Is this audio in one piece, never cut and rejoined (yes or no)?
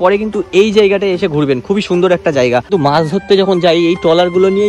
no